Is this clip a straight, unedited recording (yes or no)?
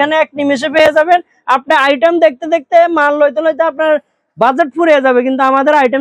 yes